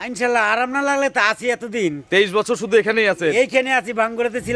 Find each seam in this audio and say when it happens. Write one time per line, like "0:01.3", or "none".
none